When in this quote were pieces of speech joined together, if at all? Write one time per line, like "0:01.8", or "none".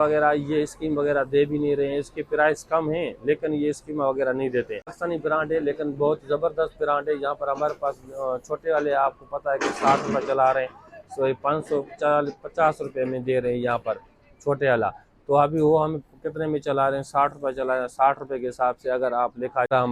none